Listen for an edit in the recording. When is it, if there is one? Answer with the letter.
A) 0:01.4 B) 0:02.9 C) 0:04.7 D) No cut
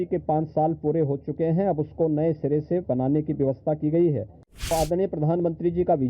C